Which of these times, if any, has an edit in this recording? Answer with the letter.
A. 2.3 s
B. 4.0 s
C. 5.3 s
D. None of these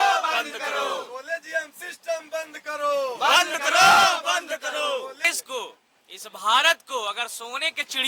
C